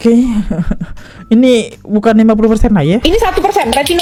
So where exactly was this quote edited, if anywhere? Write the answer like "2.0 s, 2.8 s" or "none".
none